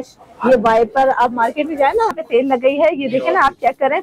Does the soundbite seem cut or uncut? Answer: cut